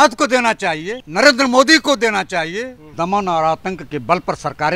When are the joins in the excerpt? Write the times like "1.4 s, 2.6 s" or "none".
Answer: 1.0 s, 2.8 s